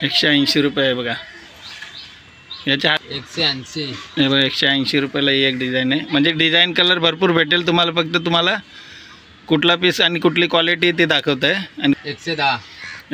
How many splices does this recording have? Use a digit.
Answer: 2